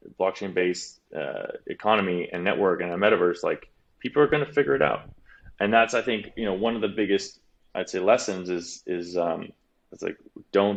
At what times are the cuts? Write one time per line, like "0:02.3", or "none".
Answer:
none